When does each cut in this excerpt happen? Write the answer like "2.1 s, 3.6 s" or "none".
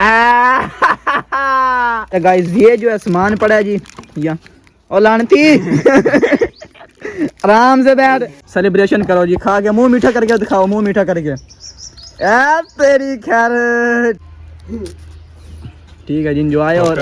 2.1 s, 8.4 s, 14.2 s